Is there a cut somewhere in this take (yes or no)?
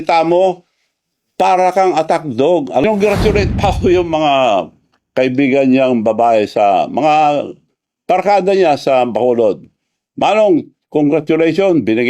yes